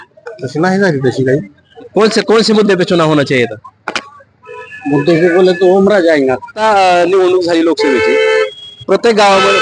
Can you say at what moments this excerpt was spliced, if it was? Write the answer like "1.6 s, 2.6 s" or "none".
1.7 s, 6.6 s

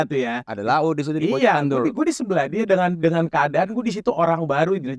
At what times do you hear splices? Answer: none

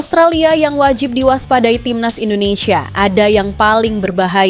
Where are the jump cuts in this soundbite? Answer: none

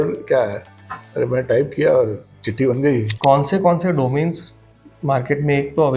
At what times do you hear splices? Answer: 3.1 s

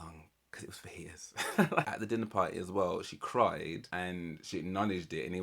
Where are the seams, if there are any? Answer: 1.9 s, 3.9 s

